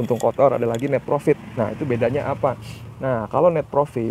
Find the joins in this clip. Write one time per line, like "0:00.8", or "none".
none